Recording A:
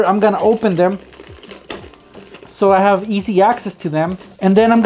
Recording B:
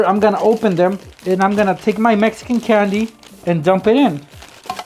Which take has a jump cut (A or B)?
B